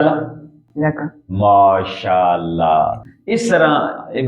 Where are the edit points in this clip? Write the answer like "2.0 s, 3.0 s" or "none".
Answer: 3.1 s